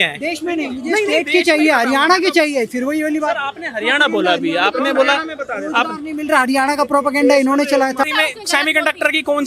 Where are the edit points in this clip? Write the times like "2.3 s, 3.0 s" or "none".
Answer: 8.0 s